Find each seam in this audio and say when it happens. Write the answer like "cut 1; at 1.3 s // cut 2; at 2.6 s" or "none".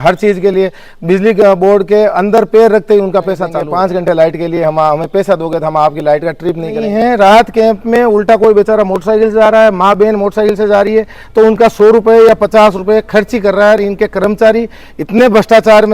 cut 1; at 3.6 s // cut 2; at 6.8 s